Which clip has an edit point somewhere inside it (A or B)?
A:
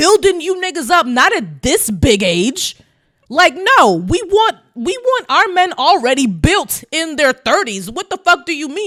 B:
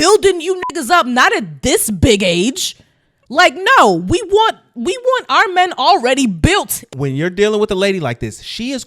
B